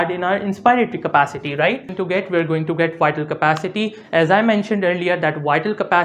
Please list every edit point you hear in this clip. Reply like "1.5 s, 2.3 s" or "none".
2.0 s